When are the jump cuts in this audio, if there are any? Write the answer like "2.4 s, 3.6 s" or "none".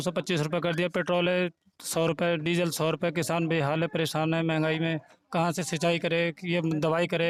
none

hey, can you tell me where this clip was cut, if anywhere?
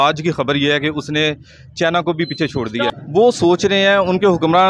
2.9 s

